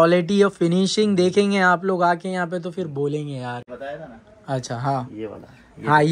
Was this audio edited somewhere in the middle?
yes; 1 cut; at 3.7 s

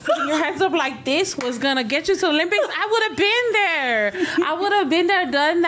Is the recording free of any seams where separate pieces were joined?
yes; 0 cuts

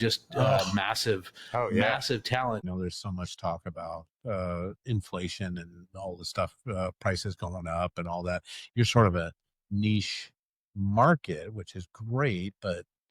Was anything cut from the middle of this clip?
yes; 1 cut; at 2.6 s

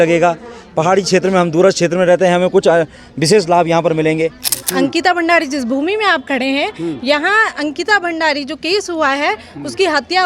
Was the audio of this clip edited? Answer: yes; 1 cut; at 4.6 s

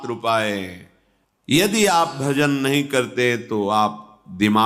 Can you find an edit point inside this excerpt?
yes; 1 cut; at 1.5 s

